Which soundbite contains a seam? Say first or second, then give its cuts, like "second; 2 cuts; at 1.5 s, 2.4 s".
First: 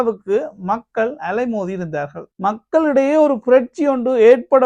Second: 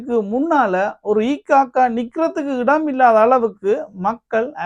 first; 1 cut; at 2.3 s